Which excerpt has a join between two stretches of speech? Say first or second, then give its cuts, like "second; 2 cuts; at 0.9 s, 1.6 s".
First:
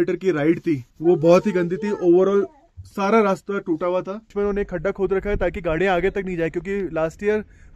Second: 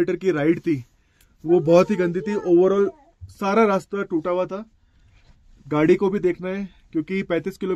first; 2 cuts; at 0.9 s, 4.3 s